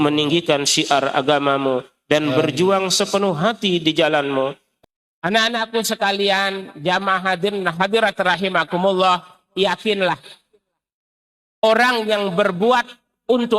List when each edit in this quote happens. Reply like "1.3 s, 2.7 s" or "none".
4.7 s